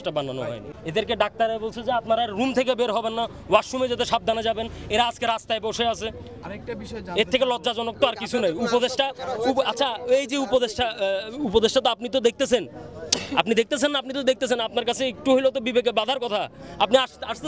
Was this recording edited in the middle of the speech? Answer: no; 0 cuts

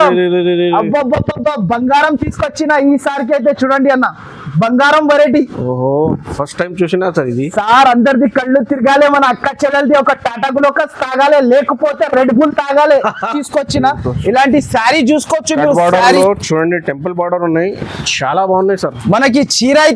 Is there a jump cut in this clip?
yes; 1 cut; at 13.4 s

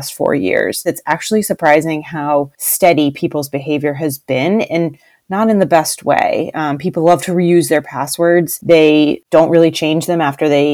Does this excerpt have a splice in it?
yes; 4 cuts; at 0.9 s, 2.6 s, 8.5 s, 9.2 s

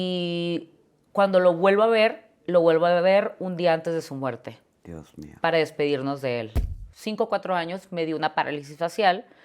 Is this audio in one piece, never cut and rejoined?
no; 1 cut; at 6.6 s

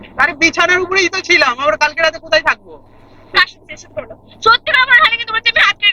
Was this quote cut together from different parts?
yes; 1 cut; at 3.3 s

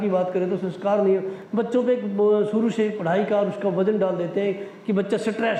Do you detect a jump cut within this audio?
no; 0 cuts

